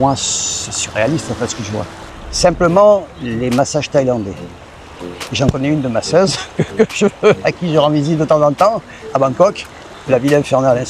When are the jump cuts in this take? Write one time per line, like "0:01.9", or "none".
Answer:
0:02.0